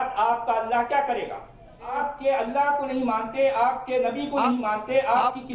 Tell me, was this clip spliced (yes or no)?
yes